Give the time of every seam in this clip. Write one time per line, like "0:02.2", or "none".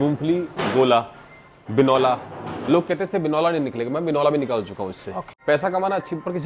0:05.2